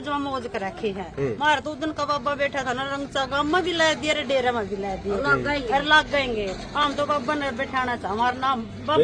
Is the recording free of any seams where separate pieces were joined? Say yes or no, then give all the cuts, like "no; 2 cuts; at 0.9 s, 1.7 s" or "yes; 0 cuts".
yes; 0 cuts